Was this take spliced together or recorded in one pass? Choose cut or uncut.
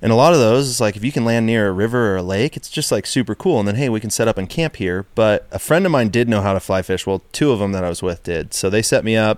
cut